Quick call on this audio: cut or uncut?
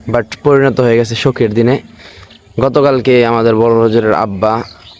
uncut